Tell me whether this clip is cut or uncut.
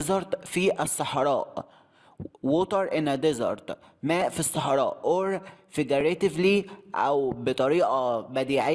uncut